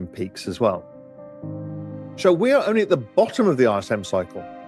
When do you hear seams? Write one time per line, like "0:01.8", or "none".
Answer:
0:00.9
0:02.2